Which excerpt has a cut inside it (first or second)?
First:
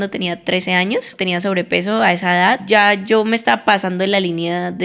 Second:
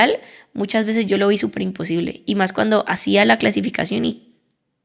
first